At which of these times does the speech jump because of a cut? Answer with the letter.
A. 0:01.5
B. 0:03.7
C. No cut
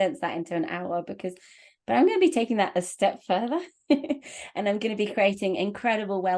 A